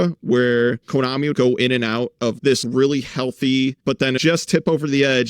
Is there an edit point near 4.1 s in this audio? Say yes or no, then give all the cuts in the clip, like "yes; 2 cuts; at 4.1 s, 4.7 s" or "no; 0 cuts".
yes; 3 cuts; at 1.3 s, 2.6 s, 4.1 s